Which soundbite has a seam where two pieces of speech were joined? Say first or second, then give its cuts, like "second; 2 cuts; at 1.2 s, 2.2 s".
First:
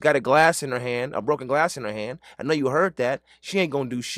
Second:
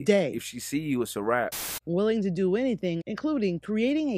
second; 2 cuts; at 1.6 s, 3.0 s